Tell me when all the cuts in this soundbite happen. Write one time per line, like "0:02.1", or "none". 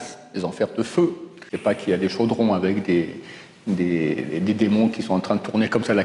0:01.5